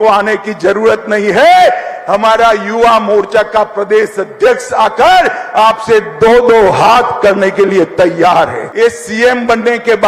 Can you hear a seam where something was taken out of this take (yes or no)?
yes